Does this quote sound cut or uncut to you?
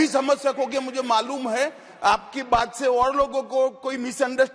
uncut